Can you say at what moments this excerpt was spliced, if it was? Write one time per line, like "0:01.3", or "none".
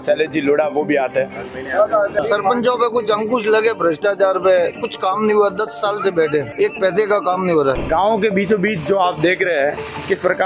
0:02.2
0:07.8

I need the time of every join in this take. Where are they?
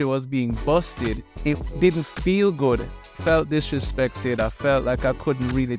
0:01.3
0:03.2

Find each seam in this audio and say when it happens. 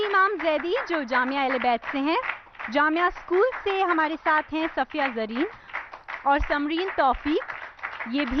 0:04.5

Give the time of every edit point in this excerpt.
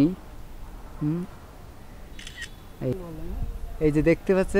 0:02.9

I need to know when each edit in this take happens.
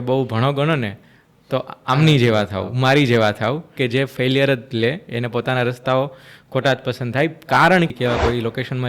0:07.9

